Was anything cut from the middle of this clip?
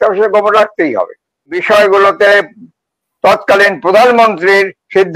yes; 1 cut; at 1.5 s

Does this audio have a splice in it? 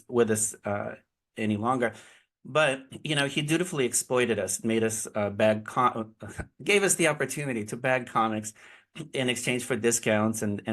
no; 0 cuts

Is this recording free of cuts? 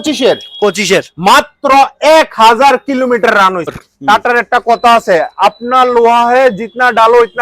no; 1 cut; at 3.9 s

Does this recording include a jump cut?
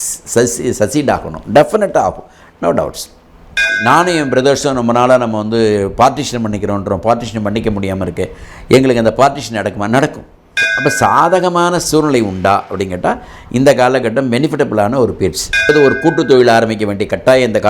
yes; 3 cuts; at 3.7 s, 10.6 s, 15.7 s

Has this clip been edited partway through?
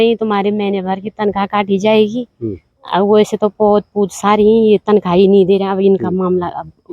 no; 0 cuts

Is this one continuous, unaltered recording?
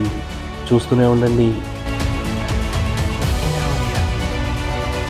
yes; 0 cuts

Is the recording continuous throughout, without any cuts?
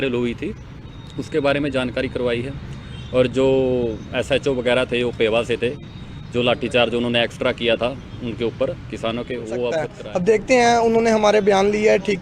no; 1 cut; at 10.0 s

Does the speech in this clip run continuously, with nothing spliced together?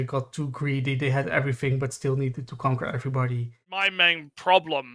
no; 1 cut; at 3.9 s

